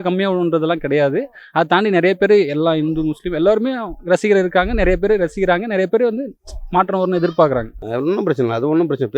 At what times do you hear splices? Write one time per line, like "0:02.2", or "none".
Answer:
0:07.8